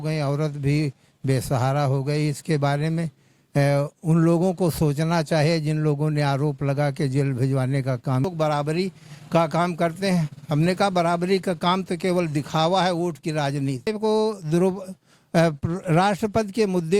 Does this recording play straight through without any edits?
no; 2 cuts; at 8.3 s, 13.9 s

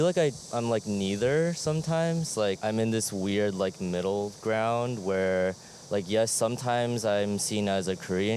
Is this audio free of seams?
yes; 0 cuts

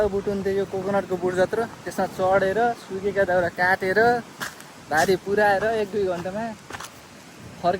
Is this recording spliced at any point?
no; 0 cuts

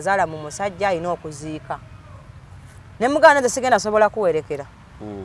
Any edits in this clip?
no; 0 cuts

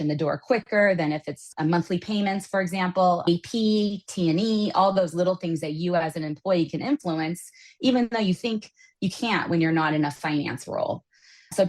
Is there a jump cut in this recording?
no; 0 cuts

